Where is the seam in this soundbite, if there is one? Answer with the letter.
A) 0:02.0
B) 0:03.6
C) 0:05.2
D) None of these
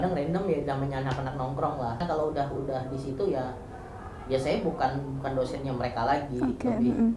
A